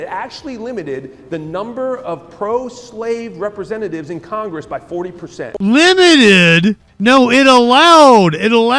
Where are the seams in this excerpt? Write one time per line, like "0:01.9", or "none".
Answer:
0:05.6
0:06.9